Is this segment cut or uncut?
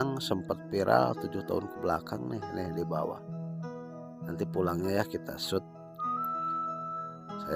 uncut